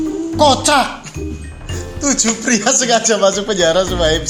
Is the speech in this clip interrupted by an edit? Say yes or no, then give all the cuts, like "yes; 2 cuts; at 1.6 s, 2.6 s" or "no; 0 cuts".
no; 0 cuts